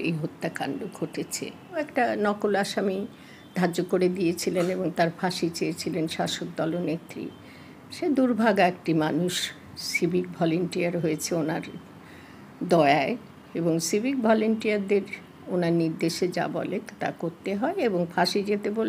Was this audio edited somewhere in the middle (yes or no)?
yes